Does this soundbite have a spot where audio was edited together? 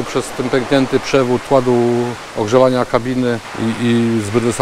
yes; 3 cuts; at 1.4 s, 2.2 s, 3.5 s

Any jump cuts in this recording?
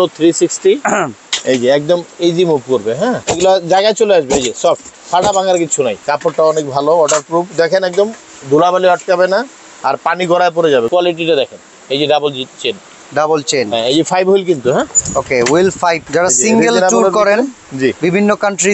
yes; 4 cuts; at 3.2 s, 6.0 s, 10.9 s, 16.0 s

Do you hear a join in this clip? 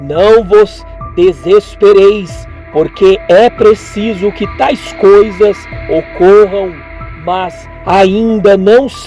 no; 0 cuts

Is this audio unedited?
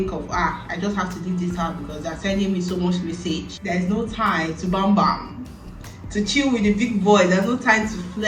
no; 1 cut; at 3.2 s

